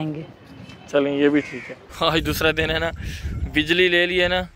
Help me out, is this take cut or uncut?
cut